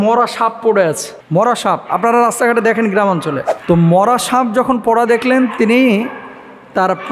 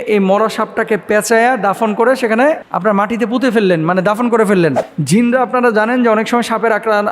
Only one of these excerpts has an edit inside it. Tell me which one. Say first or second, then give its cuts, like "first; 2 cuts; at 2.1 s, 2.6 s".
second; 1 cut; at 4.9 s